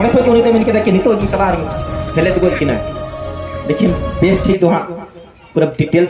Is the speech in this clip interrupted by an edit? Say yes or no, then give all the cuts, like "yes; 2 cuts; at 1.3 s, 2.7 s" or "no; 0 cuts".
no; 0 cuts